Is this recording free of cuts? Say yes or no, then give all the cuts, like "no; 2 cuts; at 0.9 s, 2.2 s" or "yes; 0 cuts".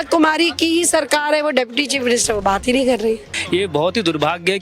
no; 1 cut; at 3.3 s